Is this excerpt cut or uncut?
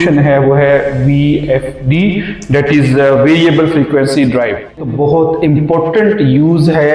cut